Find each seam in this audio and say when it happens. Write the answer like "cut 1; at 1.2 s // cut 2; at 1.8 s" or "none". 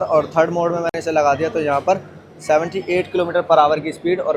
none

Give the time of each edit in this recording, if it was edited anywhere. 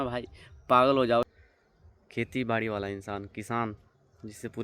cut 1; at 1.2 s

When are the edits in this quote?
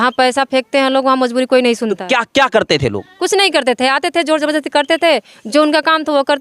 none

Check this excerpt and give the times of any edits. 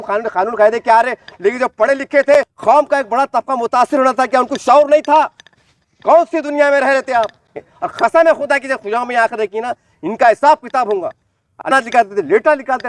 cut 1; at 2.3 s // cut 2; at 7.5 s // cut 3; at 11.7 s

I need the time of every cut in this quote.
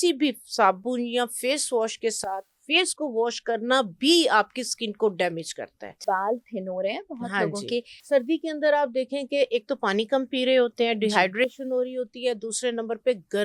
cut 1; at 6.0 s // cut 2; at 7.9 s

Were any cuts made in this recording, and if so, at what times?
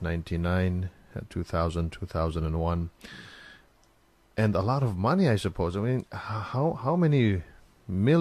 none

